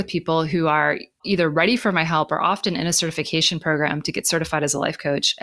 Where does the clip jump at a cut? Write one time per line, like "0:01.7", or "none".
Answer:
0:01.2